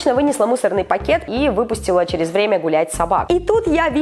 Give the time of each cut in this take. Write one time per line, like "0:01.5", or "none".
0:01.2
0:03.2